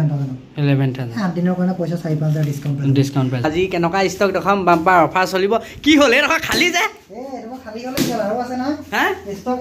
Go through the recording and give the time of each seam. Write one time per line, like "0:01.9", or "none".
0:03.4